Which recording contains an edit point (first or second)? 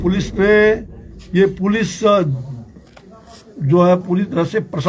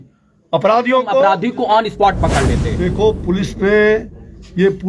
second